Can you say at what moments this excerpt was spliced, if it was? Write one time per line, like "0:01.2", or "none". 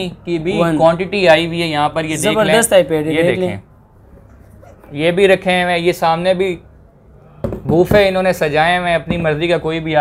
none